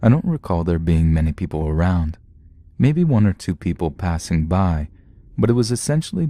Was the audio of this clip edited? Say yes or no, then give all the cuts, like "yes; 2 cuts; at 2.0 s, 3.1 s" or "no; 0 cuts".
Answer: no; 0 cuts